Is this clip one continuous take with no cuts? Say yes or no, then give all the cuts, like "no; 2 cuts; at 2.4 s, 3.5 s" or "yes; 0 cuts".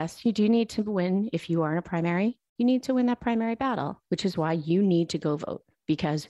yes; 0 cuts